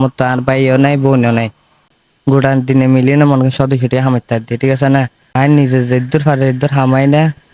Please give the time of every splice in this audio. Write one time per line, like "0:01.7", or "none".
0:01.9
0:05.2